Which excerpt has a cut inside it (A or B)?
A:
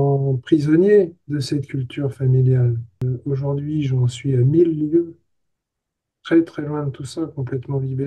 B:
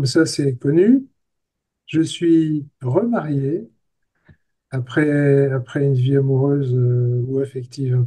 A